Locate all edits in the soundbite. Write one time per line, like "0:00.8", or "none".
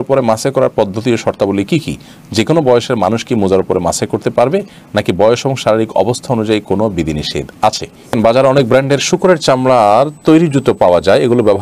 0:08.2